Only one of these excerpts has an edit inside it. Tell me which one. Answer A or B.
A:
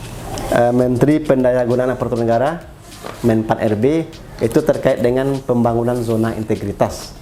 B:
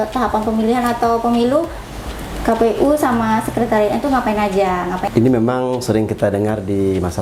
B